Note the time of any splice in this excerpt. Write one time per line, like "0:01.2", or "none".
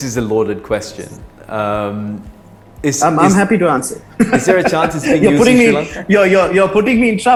none